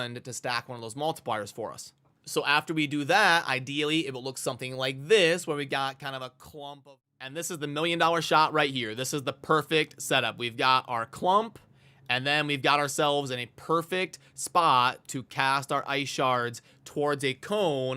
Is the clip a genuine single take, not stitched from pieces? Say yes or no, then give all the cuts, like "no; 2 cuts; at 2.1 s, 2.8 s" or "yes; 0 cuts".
no; 1 cut; at 6.7 s